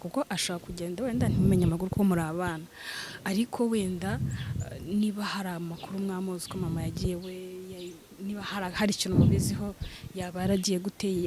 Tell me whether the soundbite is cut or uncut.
uncut